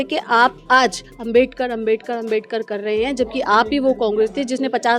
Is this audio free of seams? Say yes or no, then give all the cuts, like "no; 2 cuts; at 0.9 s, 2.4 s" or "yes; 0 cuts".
yes; 0 cuts